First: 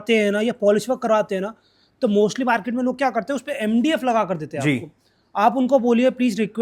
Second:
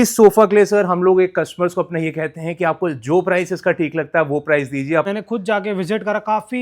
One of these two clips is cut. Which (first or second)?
second